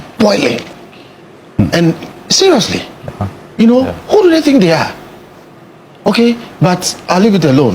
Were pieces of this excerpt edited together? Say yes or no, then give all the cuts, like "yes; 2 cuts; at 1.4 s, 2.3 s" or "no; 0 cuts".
no; 0 cuts